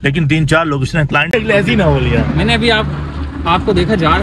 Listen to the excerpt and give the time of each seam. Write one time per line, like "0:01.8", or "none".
0:01.3